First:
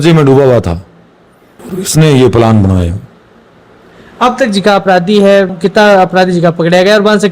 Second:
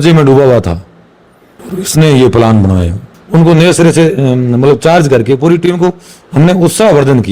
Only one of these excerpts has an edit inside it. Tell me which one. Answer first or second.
second